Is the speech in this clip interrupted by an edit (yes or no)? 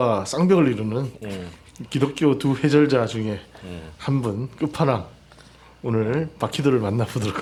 no